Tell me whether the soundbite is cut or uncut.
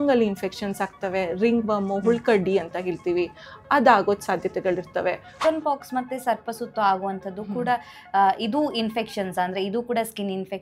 cut